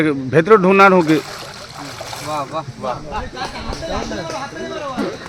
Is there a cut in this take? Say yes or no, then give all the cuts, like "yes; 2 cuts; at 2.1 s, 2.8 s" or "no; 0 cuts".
no; 0 cuts